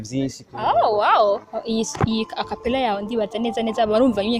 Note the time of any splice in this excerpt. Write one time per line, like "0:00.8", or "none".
0:01.5